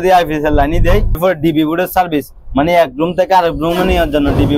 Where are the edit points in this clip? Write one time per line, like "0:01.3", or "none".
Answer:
0:01.2